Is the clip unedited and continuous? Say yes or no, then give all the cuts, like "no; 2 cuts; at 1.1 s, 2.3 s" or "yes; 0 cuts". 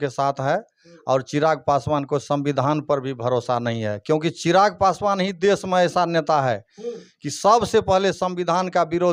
yes; 0 cuts